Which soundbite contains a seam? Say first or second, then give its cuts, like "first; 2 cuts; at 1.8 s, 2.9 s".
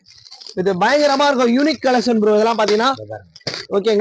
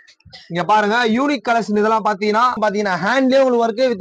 second; 1 cut; at 2.6 s